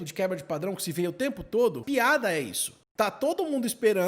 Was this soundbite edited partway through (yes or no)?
yes